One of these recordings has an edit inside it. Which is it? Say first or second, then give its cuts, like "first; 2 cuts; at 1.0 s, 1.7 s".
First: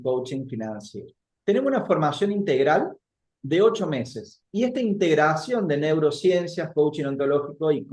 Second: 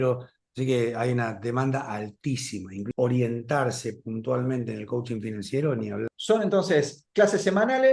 second; 2 cuts; at 2.9 s, 6.2 s